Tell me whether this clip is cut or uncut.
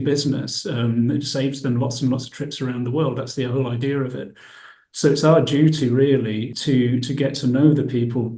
cut